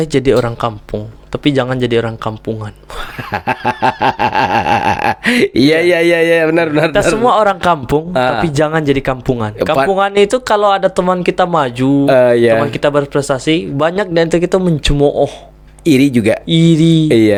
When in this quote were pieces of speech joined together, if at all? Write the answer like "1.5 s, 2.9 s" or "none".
none